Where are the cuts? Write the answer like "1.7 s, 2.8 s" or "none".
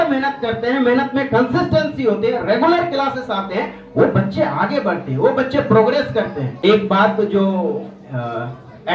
6.4 s

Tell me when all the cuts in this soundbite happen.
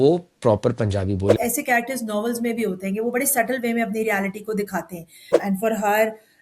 1.3 s, 5.3 s

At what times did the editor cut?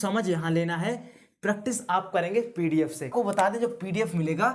3.1 s

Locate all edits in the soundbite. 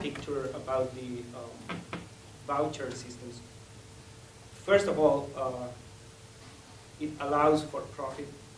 6.8 s

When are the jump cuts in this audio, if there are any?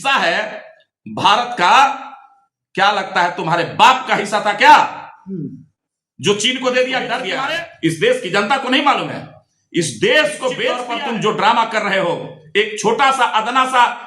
7.3 s, 10.9 s

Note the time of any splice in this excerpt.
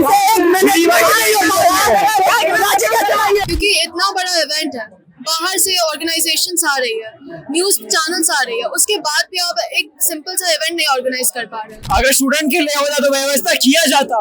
3.4 s, 11.7 s

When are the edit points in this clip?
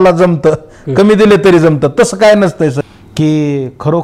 2.8 s

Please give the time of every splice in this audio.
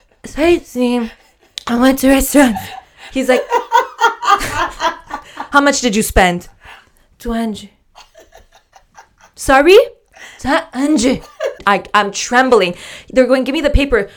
11.6 s

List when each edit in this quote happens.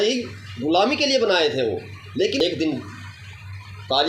2.4 s

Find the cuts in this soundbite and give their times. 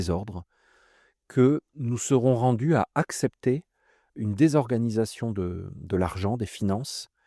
1.7 s, 4.1 s

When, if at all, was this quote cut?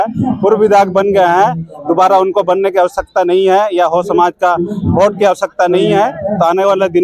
none

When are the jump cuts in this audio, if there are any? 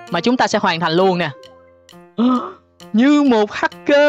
none

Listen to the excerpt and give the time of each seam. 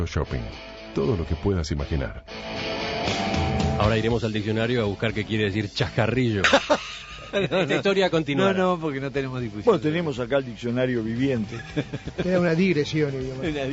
1.6 s

